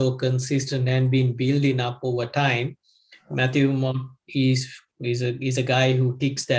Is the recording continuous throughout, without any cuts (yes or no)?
yes